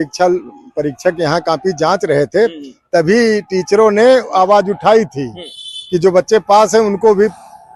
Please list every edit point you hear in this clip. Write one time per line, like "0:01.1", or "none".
none